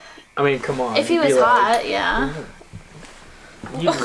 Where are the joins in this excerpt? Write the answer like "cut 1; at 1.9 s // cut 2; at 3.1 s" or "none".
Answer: none